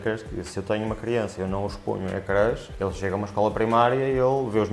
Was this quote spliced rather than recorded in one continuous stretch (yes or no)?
no